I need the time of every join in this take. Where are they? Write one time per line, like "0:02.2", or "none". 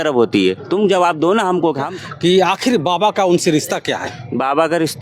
0:01.9